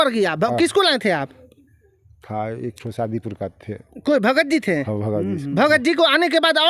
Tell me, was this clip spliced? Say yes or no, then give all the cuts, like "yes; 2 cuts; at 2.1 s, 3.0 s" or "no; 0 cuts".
no; 0 cuts